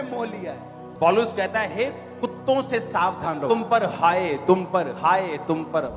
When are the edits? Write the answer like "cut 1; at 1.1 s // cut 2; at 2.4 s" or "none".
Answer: cut 1; at 3.4 s